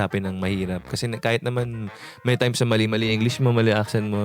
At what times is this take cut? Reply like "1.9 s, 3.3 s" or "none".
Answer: none